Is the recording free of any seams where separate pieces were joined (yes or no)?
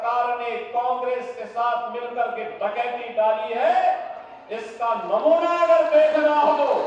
yes